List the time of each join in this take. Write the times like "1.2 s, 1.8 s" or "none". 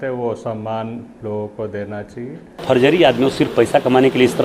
2.6 s